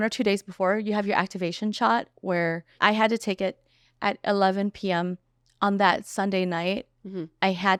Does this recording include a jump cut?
no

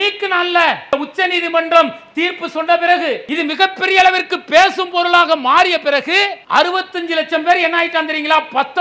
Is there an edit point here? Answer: yes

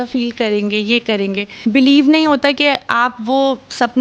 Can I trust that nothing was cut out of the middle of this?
no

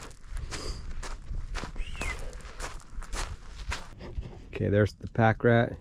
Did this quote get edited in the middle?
yes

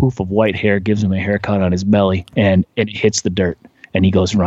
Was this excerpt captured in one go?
no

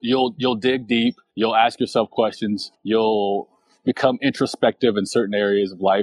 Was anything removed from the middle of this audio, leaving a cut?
yes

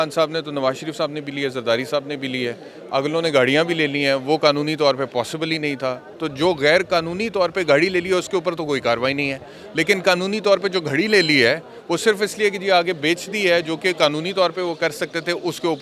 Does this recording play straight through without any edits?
yes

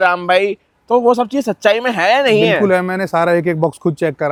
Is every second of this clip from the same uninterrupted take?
yes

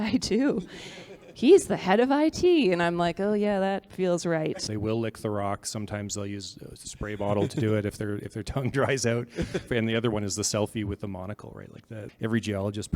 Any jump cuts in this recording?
yes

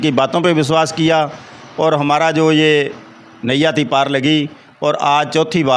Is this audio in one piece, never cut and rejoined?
yes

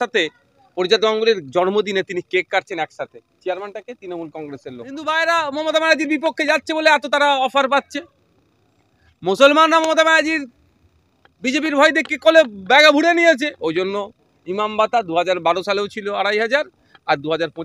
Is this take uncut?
no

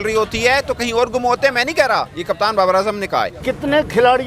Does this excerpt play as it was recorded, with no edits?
no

